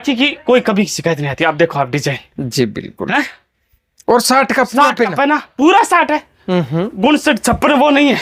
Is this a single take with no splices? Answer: yes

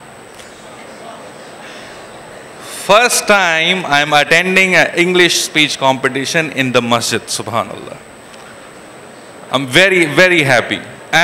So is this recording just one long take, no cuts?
yes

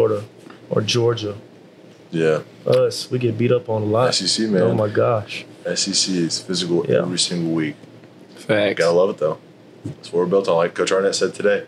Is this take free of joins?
yes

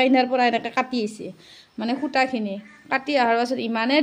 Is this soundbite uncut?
yes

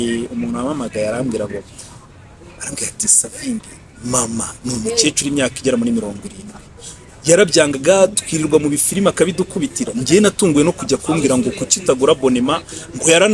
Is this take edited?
no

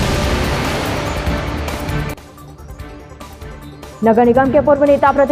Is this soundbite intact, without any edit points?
no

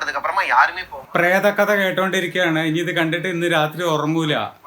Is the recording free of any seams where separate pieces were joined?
no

